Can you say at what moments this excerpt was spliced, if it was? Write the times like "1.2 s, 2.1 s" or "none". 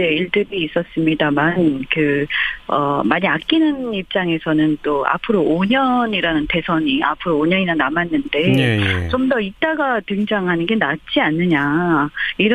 none

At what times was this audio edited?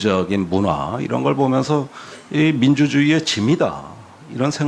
none

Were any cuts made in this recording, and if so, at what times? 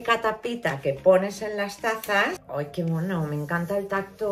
2.4 s

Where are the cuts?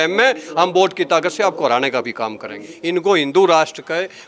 2.7 s

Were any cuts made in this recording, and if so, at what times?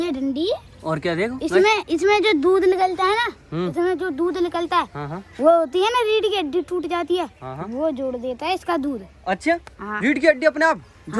none

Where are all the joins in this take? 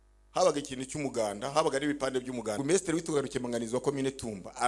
2.6 s

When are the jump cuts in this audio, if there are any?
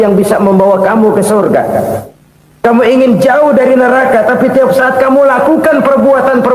none

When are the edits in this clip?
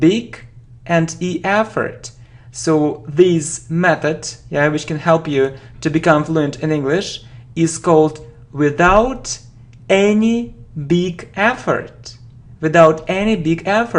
5.7 s

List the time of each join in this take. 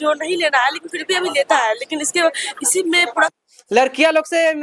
3.3 s

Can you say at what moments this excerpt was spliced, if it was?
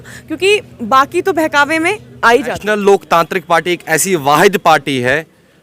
2.6 s

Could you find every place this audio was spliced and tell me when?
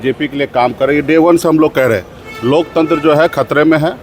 none

